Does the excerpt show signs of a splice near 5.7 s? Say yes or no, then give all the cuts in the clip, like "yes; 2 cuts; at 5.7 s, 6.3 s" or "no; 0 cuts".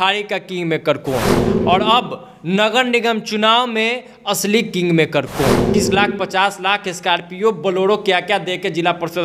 yes; 1 cut; at 5.7 s